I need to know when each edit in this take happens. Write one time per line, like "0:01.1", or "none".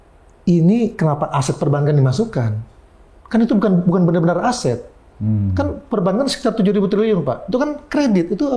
none